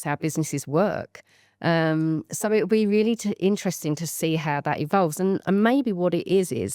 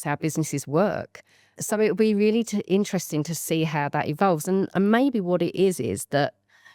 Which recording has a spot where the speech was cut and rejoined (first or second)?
second